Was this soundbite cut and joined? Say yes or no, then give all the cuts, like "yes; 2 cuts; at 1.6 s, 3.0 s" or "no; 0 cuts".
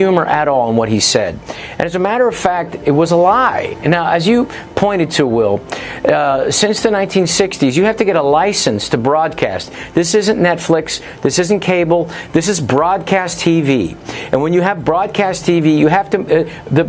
yes; 1 cut; at 1.7 s